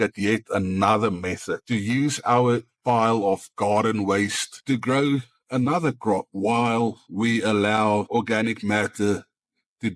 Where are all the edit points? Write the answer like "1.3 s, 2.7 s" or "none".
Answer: 2.8 s, 6.3 s, 8.1 s